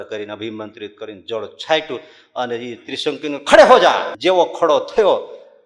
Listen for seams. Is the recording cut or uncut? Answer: cut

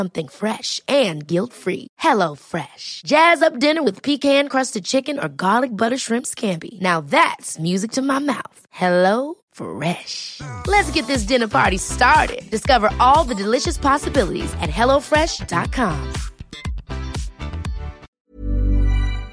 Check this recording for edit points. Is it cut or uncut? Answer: cut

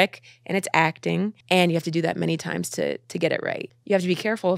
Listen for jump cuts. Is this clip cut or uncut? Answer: cut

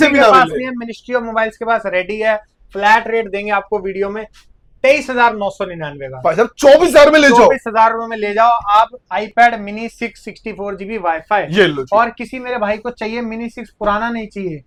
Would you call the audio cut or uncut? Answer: uncut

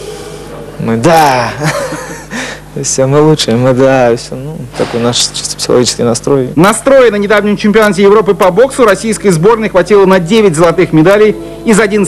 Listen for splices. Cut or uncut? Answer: cut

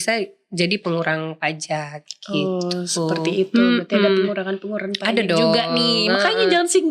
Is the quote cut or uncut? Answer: uncut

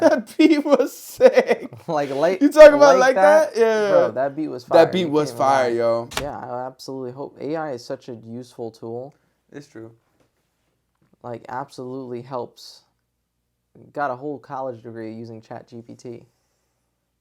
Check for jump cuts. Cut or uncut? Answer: cut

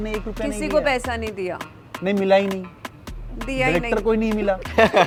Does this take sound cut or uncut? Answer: uncut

